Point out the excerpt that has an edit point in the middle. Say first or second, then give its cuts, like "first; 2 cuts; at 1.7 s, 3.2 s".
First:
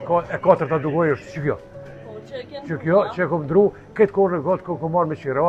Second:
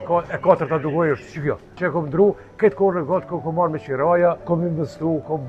second; 2 cuts; at 1.7 s, 4.4 s